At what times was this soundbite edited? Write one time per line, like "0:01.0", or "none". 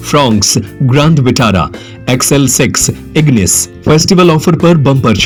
none